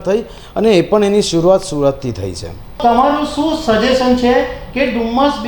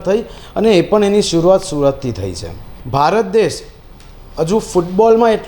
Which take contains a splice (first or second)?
second